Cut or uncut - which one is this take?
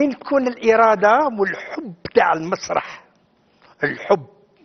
cut